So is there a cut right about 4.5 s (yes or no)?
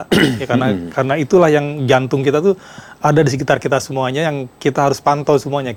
no